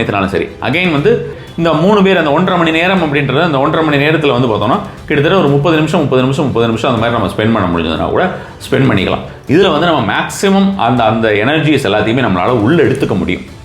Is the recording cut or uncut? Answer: cut